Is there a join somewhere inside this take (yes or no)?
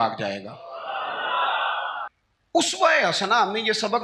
yes